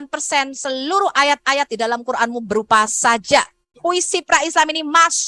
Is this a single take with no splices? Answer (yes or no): no